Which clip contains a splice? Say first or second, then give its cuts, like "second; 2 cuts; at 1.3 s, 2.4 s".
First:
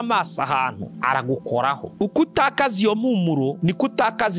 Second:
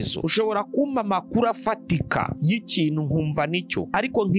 first; 1 cut; at 1.9 s